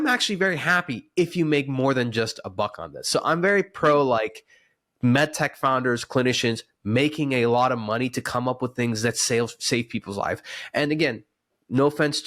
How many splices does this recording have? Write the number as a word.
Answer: zero